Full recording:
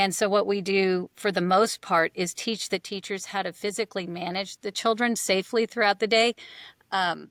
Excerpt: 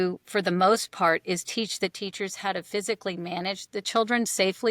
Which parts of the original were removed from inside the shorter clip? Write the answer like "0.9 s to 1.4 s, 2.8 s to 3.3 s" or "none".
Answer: none

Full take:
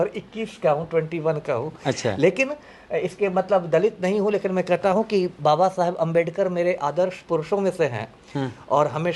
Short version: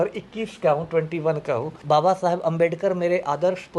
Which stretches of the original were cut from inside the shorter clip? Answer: 1.8 s to 5.3 s

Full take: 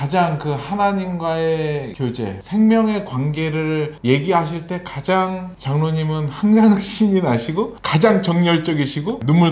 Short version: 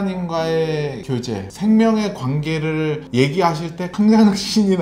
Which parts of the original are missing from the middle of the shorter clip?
4.8 s to 6.3 s

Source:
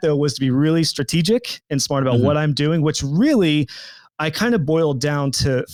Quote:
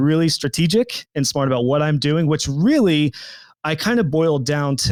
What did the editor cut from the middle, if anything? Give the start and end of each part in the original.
none

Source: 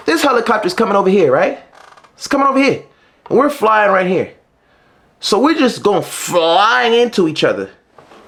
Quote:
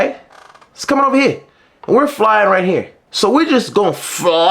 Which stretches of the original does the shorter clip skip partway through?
4.4 s to 5.1 s

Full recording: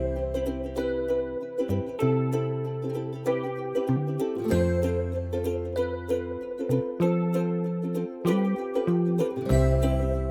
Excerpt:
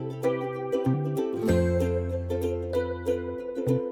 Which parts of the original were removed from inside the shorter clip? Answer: none

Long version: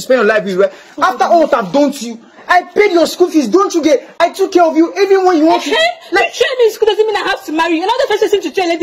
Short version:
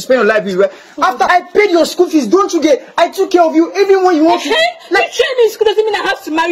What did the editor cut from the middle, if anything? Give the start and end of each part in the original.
1.3 s to 2.5 s

